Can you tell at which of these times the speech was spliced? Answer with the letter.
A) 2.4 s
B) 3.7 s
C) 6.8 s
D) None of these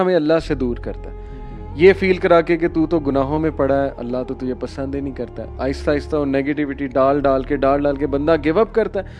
D